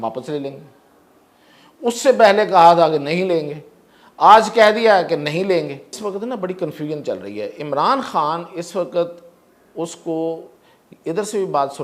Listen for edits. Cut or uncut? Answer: cut